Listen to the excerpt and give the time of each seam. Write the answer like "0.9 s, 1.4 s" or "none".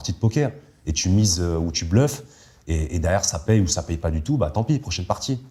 none